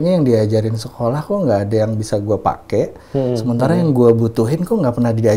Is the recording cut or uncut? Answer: uncut